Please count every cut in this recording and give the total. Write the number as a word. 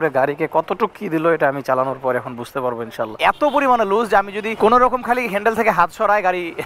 two